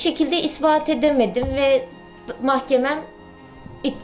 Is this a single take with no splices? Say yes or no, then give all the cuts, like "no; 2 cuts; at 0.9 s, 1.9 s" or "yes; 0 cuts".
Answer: yes; 0 cuts